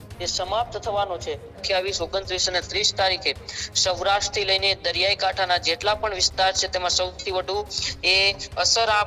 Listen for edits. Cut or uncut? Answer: cut